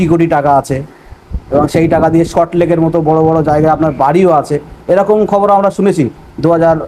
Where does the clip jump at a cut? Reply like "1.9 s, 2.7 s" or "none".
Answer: none